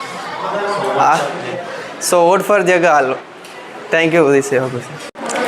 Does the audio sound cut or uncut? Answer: uncut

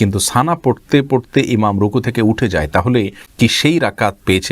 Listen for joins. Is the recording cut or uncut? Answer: cut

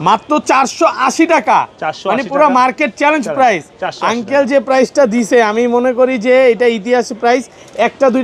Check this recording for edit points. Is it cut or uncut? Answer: uncut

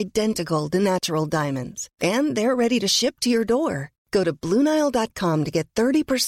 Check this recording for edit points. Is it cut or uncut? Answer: uncut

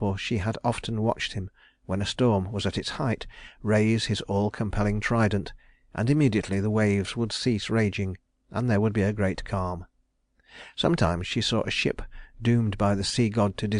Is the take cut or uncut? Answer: uncut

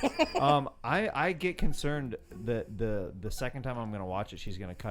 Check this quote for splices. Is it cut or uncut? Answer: uncut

